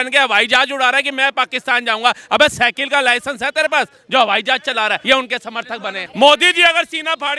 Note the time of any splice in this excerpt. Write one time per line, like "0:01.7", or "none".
0:05.0
0:06.0